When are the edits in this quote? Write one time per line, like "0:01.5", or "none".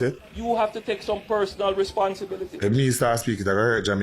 none